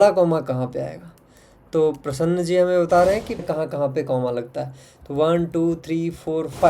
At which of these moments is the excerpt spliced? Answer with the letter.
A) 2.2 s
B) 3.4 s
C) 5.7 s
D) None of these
B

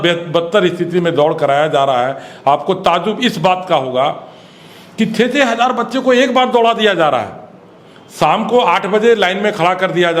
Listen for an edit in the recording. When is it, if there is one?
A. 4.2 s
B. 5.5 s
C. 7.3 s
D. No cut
D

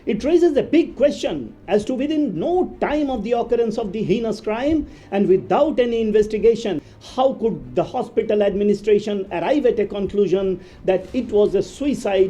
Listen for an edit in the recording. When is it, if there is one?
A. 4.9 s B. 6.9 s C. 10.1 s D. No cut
B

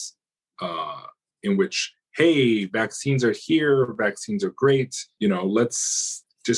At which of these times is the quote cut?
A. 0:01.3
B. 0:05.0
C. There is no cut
B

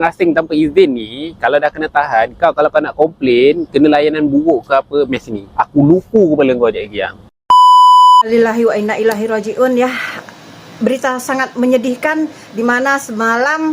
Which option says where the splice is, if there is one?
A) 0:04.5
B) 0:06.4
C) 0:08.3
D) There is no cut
C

